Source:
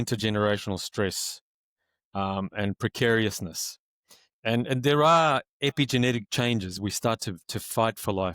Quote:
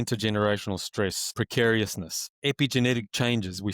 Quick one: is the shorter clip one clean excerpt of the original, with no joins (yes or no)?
no